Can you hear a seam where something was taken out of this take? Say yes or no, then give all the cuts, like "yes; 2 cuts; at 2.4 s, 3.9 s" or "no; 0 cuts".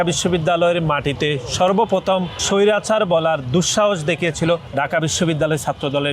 yes; 2 cuts; at 2.4 s, 4.7 s